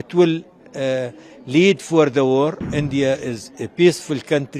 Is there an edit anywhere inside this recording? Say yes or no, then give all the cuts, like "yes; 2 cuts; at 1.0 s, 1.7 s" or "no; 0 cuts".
yes; 1 cut; at 2.6 s